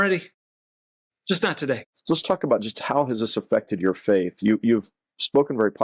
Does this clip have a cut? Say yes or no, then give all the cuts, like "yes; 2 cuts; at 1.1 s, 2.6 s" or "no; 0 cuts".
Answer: yes; 1 cut; at 1.9 s